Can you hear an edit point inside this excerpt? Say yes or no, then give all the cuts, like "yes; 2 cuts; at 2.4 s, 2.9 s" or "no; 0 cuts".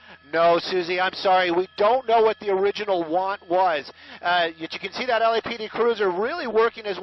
no; 0 cuts